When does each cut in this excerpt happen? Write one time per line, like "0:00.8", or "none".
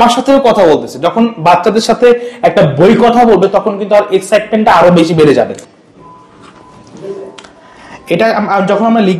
0:05.6